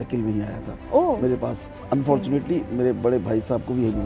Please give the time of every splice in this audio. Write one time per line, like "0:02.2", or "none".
0:01.7